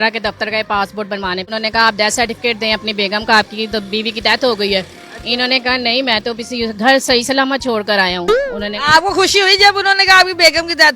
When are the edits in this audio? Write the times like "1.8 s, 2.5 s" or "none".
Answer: 1.5 s